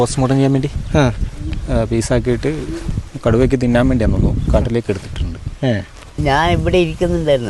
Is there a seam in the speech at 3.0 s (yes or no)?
no